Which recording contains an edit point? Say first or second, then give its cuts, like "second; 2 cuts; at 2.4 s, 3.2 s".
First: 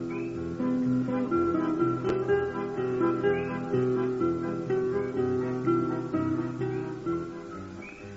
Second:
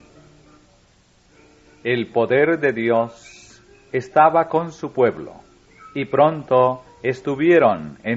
first; 1 cut; at 3.6 s